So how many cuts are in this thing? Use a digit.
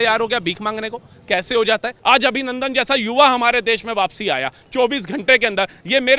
1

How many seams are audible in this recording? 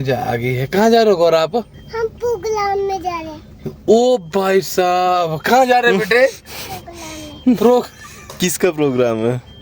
1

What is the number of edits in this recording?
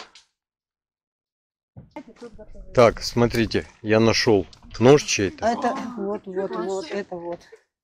1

